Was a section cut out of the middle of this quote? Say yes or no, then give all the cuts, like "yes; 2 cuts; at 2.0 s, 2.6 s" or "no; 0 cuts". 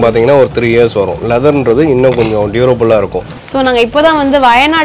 yes; 1 cut; at 3.3 s